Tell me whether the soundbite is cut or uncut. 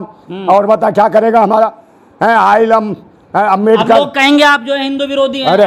uncut